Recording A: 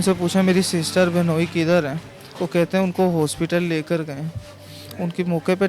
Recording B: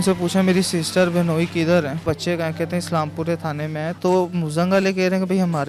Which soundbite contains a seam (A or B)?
B